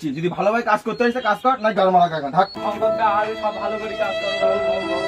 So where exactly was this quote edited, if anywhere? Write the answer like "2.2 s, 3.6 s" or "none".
2.6 s